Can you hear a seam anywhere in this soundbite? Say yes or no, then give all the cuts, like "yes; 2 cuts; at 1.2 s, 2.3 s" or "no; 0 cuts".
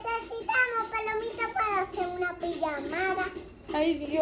no; 0 cuts